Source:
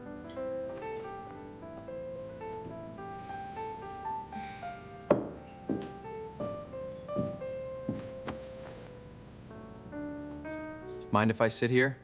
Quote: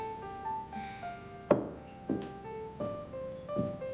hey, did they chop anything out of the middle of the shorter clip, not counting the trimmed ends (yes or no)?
no